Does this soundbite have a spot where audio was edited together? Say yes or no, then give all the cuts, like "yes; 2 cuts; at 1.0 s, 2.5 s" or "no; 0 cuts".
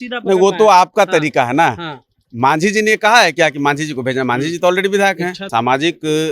yes; 1 cut; at 5.3 s